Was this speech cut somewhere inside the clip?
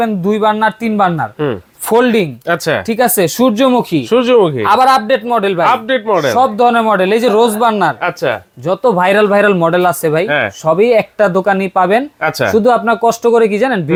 no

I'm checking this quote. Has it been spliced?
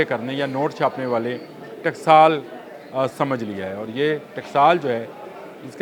no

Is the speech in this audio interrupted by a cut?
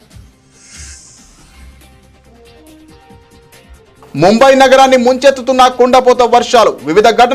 no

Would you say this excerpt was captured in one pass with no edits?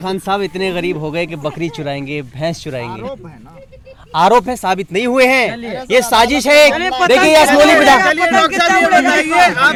yes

